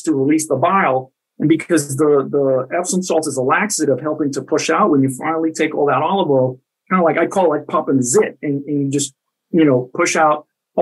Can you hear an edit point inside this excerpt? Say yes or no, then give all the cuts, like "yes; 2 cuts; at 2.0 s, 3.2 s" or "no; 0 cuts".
no; 0 cuts